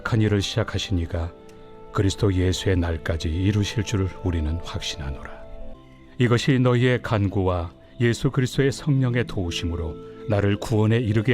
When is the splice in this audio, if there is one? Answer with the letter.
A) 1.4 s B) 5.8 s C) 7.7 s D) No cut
B